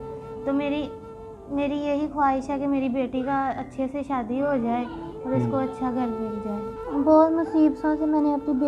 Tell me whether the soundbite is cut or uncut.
cut